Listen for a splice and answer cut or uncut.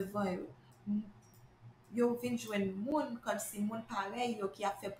uncut